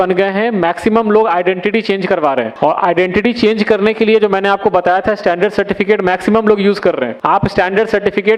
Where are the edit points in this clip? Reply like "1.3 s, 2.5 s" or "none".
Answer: 2.5 s, 7.1 s